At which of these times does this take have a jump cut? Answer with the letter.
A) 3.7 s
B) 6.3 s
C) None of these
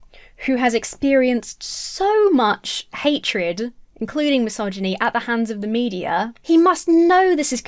C